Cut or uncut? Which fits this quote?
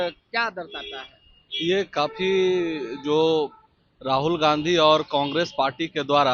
uncut